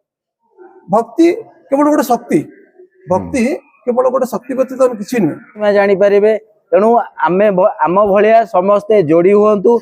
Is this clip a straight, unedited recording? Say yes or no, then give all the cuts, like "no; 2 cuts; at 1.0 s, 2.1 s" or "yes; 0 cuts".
no; 1 cut; at 5.6 s